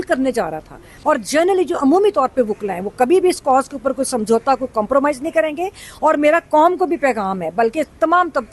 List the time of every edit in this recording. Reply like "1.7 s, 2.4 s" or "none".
0.9 s

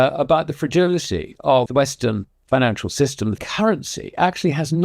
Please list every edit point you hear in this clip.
1.7 s, 3.4 s

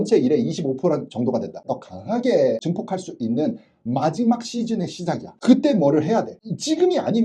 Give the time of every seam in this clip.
1.6 s

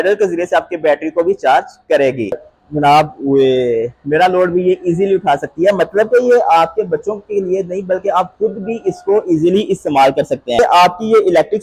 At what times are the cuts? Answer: 2.4 s, 10.6 s

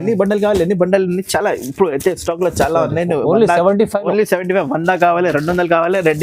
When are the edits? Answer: none

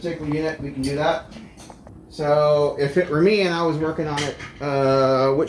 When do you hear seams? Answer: none

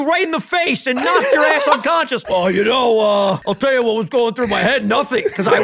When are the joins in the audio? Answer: 2.3 s, 3.5 s

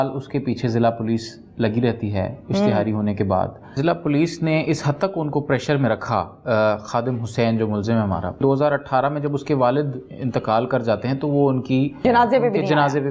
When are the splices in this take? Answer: 3.7 s, 8.4 s, 12.0 s

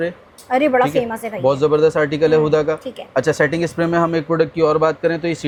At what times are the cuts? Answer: none

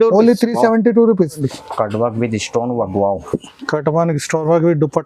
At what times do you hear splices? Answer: 1.5 s

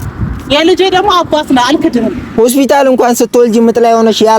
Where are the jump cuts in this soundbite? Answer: 2.2 s

